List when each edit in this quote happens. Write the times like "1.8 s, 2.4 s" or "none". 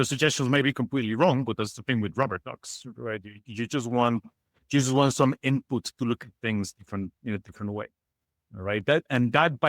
none